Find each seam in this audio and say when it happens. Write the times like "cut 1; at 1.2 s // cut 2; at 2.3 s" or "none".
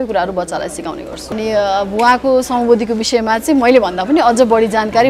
cut 1; at 1.3 s

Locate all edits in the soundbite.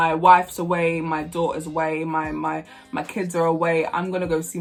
none

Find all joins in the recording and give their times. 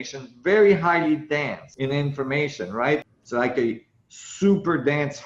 cut 1; at 1.6 s // cut 2; at 3.0 s

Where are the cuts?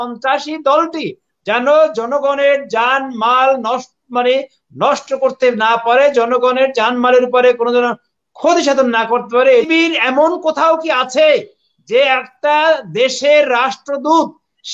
cut 1; at 9.7 s

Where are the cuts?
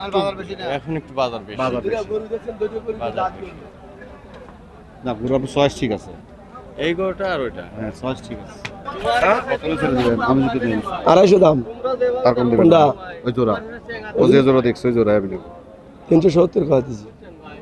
none

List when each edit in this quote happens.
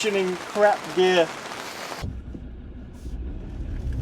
cut 1; at 2.0 s

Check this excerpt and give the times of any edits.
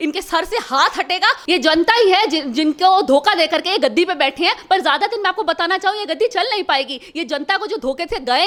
none

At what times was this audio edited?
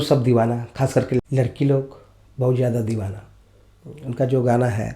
cut 1; at 1.2 s

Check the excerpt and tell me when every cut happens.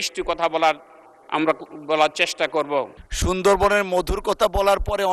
cut 1; at 3.0 s

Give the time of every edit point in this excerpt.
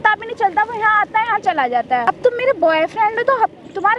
cut 1; at 2.0 s

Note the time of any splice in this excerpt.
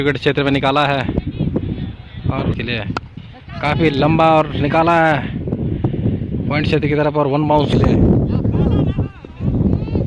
cut 1; at 2.5 s // cut 2; at 7.7 s

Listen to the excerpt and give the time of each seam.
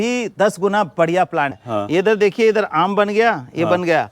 cut 1; at 1.6 s

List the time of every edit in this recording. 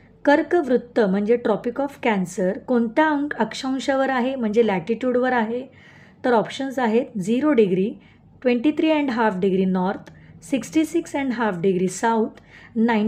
none

